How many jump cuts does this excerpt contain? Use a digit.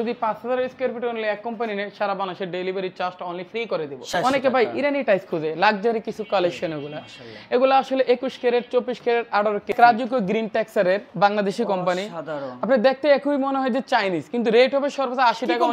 2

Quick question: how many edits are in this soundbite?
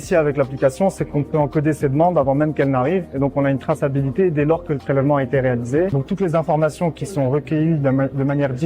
1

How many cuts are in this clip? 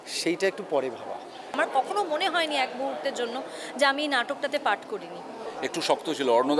2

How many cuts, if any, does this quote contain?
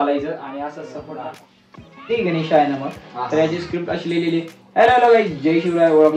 1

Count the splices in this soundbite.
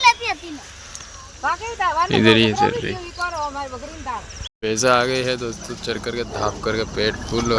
0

